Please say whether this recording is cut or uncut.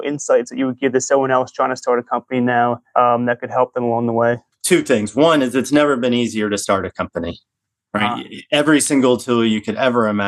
uncut